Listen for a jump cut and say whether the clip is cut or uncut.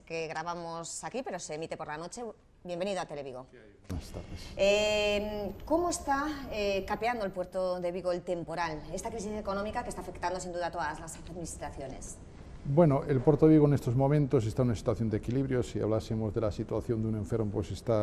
cut